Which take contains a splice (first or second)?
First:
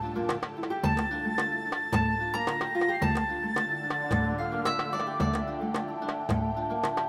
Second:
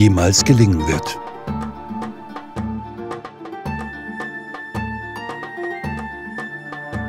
second